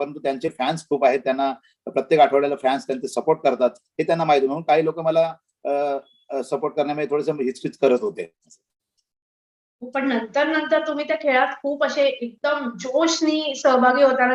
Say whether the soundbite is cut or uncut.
uncut